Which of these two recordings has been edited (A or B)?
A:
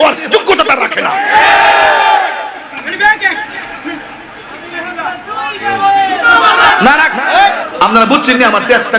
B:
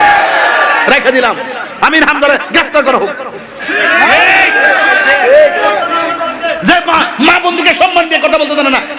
A